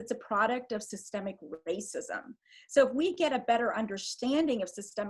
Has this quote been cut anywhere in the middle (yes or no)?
no